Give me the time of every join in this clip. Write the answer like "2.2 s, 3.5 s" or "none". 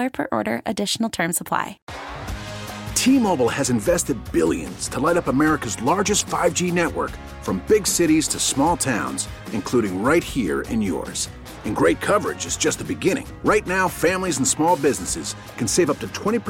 1.9 s